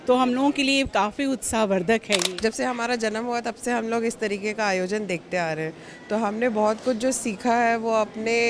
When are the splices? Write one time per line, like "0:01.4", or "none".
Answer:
0:02.3